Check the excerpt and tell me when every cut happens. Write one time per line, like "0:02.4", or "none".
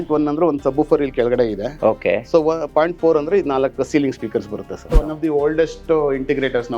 0:04.8

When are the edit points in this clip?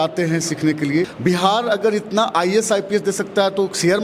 0:01.1

